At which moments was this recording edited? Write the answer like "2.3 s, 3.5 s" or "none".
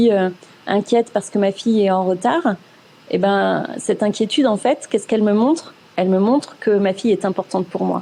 none